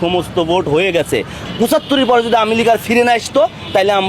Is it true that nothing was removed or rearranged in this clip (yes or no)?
no